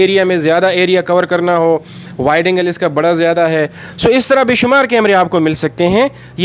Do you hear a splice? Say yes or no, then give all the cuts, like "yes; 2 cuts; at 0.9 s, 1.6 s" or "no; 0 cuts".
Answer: no; 0 cuts